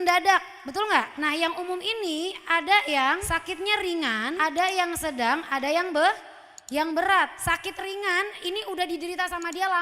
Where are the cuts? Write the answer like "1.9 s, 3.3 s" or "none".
1.1 s